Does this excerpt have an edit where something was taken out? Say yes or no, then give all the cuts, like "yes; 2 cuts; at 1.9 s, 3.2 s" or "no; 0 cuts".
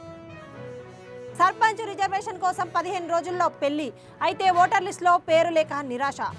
yes; 1 cut; at 1.3 s